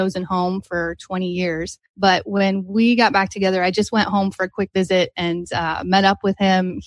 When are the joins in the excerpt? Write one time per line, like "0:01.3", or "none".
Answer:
0:01.8